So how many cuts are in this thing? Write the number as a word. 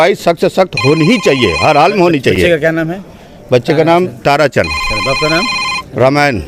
zero